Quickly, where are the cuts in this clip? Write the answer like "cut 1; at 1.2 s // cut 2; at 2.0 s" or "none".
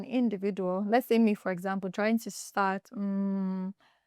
none